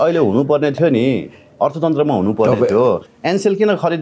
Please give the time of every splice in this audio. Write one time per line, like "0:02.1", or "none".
0:03.1